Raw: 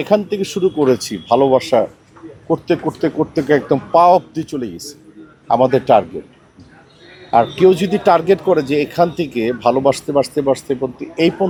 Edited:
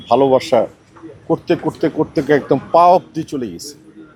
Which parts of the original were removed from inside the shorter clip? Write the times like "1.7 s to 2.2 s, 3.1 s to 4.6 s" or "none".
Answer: none